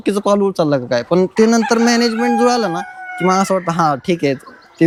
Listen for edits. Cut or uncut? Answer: uncut